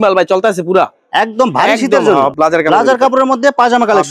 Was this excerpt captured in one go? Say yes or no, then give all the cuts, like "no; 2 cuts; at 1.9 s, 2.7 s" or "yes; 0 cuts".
no; 1 cut; at 2.3 s